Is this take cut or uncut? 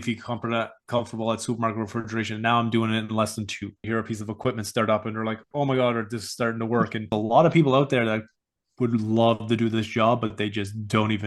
cut